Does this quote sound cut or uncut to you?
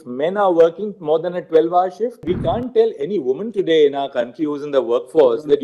cut